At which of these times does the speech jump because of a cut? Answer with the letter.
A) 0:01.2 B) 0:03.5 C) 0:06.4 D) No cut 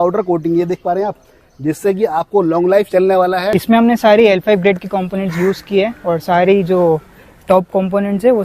B